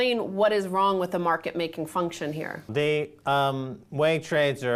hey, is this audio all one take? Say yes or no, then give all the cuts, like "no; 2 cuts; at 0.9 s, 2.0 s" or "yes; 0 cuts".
yes; 0 cuts